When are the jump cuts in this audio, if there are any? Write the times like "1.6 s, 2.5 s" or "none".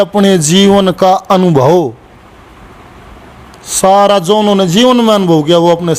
none